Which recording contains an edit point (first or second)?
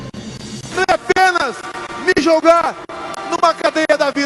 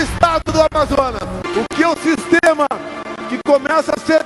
second